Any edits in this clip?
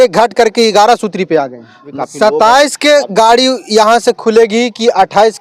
yes; 1 cut; at 1.9 s

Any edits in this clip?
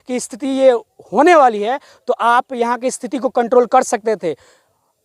no; 0 cuts

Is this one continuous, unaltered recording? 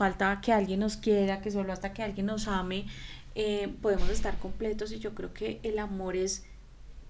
yes; 0 cuts

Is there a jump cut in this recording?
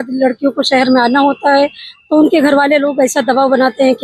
no; 0 cuts

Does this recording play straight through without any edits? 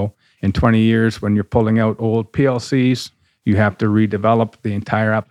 yes; 0 cuts

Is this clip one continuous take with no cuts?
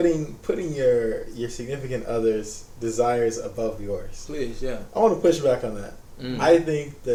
yes; 0 cuts

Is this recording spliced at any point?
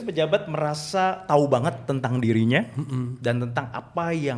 no; 0 cuts

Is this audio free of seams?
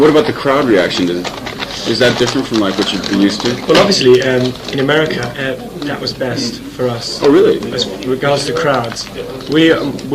no; 1 cut; at 4.6 s

